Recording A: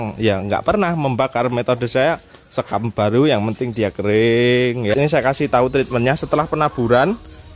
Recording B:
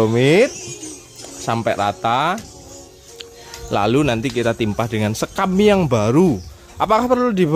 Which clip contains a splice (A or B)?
A